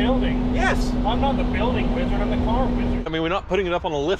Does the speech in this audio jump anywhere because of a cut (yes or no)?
yes